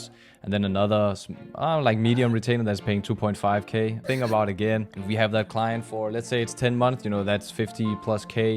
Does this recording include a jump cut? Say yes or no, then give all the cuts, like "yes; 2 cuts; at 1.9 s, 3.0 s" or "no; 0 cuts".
yes; 2 cuts; at 4.0 s, 4.9 s